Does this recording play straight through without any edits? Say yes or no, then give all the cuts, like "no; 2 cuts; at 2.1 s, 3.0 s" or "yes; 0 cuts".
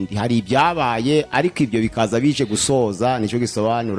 yes; 0 cuts